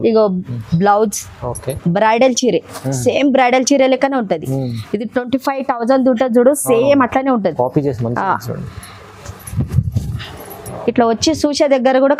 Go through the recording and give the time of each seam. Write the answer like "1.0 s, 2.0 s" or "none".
none